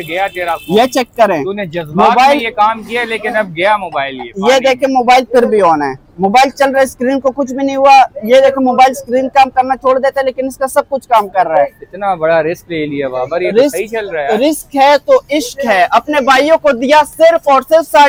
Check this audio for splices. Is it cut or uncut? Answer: uncut